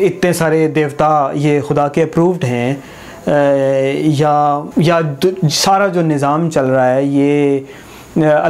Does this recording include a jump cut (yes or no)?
yes